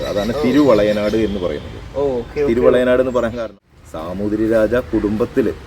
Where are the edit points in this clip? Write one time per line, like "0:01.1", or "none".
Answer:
0:03.4